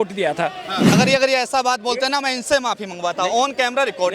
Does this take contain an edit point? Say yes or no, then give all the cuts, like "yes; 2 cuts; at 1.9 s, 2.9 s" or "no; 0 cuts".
yes; 1 cut; at 1.0 s